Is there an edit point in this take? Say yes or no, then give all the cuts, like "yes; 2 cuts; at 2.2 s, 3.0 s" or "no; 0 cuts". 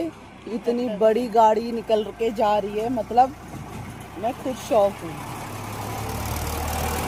no; 0 cuts